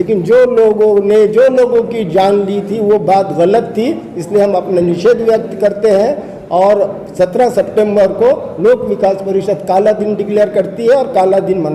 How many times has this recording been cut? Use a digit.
0